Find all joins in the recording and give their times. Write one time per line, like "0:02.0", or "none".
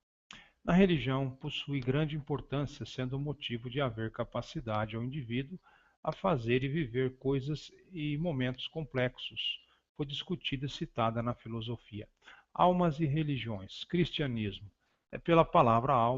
0:01.8

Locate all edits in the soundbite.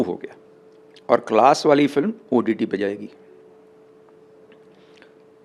none

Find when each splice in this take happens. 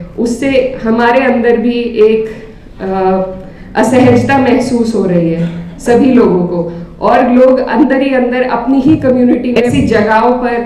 0:09.6

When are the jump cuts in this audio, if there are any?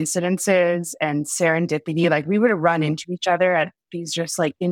none

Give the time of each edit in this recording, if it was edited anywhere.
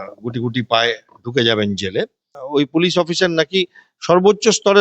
0:02.3

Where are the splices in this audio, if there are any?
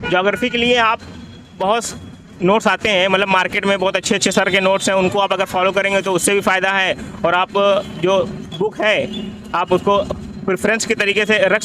none

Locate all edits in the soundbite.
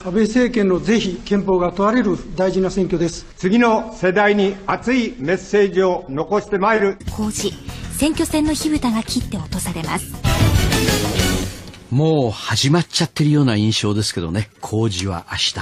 none

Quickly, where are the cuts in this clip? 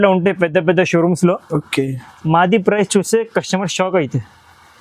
none

